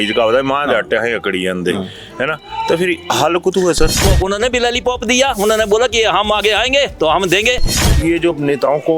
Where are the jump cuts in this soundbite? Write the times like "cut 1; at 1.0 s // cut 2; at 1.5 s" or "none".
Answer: cut 1; at 4.0 s // cut 2; at 7.8 s